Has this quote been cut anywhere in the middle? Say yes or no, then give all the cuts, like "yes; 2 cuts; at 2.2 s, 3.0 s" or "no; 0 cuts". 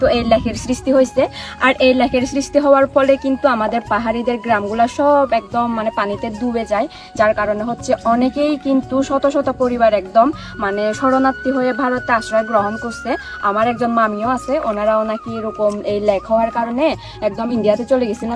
no; 0 cuts